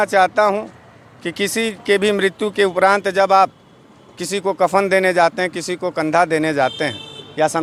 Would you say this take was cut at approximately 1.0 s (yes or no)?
no